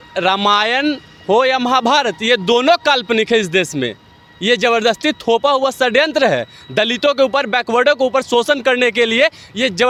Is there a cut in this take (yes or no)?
no